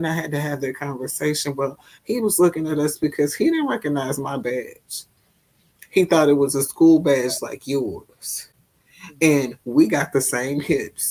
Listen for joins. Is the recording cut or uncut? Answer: uncut